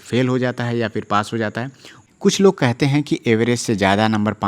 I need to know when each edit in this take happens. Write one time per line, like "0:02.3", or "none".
0:01.9